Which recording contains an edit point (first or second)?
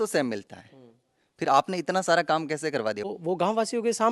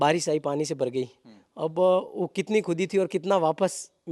first